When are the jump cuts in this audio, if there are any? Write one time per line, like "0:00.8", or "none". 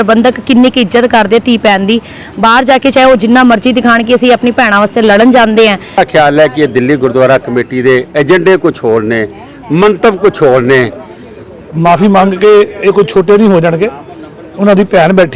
0:06.0
0:11.7